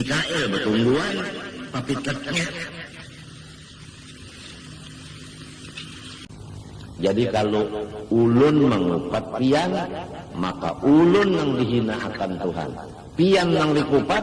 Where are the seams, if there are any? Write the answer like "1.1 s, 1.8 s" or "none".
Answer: 6.2 s